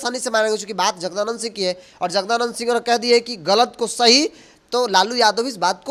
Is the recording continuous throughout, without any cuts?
yes; 0 cuts

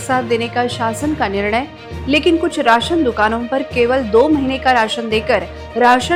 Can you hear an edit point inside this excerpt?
no; 0 cuts

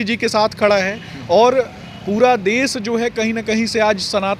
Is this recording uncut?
yes; 0 cuts

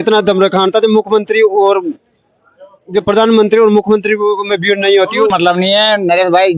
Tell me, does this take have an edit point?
yes; 1 cut; at 5.3 s

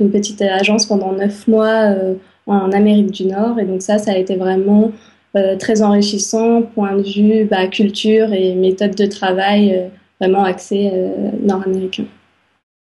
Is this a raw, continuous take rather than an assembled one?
yes; 0 cuts

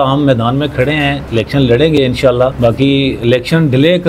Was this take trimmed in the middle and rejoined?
yes; 2 cuts; at 1.2 s, 2.5 s

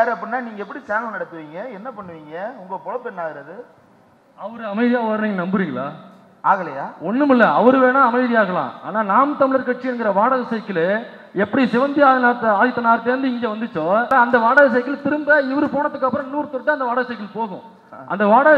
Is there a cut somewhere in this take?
yes; 1 cut; at 14.1 s

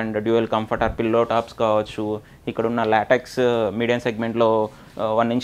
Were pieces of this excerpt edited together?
no; 0 cuts

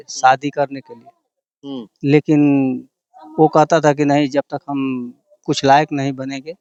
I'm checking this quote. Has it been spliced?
no; 0 cuts

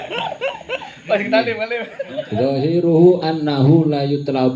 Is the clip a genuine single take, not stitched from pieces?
no; 1 cut; at 2.0 s

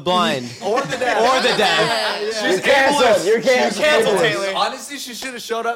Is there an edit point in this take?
no; 0 cuts

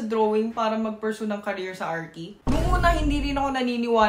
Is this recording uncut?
yes; 0 cuts

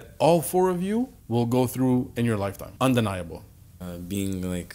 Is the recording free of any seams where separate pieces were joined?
no; 3 cuts; at 1.2 s, 2.6 s, 3.7 s

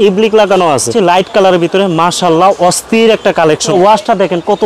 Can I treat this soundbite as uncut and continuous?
no; 2 cuts; at 0.9 s, 3.7 s

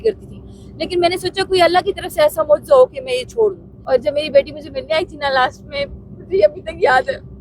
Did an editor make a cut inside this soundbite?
yes; 1 cut; at 3.7 s

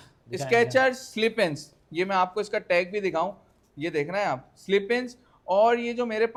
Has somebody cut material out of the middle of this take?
no; 0 cuts

